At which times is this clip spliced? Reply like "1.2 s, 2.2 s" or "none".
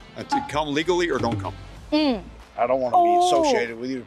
2.3 s